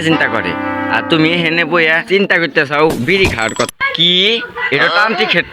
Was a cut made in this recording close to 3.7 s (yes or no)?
yes